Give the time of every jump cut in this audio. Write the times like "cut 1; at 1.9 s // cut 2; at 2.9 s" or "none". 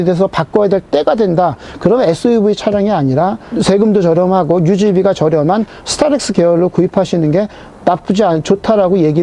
cut 1; at 3.5 s